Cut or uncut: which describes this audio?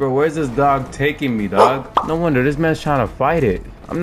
cut